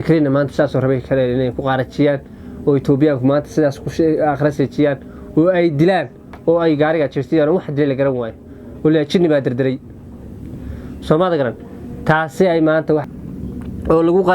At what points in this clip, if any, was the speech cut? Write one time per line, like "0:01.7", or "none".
0:13.1